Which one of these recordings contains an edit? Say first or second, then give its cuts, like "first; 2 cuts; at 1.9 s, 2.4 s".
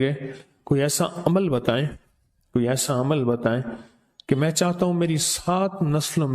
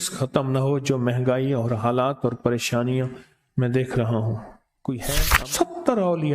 second; 1 cut; at 5.3 s